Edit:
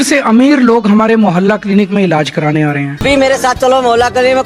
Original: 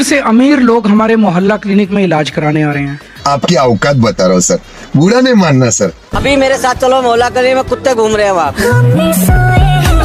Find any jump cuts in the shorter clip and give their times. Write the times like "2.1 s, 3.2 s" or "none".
2.9 s